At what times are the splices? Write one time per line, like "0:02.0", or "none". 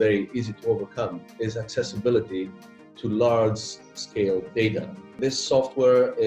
0:05.1